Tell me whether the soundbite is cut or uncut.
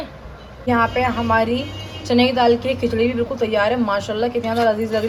uncut